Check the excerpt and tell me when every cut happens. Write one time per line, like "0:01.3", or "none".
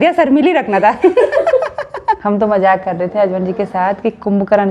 0:02.2